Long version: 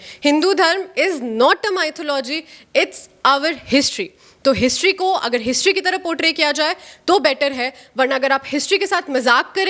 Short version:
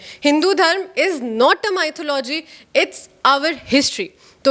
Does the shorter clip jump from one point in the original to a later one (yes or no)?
no